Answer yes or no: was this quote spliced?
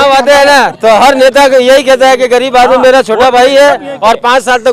no